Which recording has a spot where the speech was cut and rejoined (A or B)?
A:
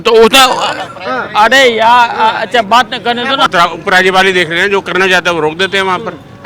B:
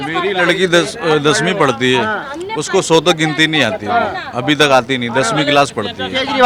A